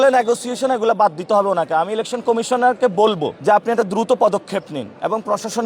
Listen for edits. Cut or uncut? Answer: cut